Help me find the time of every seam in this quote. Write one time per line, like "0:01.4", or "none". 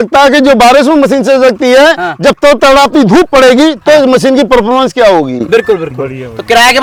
none